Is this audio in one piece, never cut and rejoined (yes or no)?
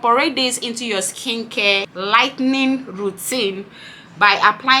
no